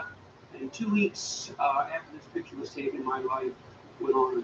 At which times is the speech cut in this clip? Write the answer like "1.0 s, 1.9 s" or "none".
none